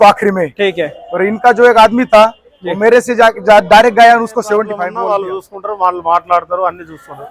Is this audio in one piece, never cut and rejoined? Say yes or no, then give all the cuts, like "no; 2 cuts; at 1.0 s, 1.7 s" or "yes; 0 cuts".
no; 1 cut; at 4.8 s